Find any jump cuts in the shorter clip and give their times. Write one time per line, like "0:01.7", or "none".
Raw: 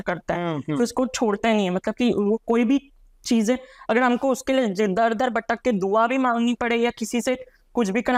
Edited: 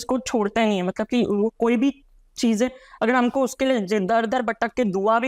none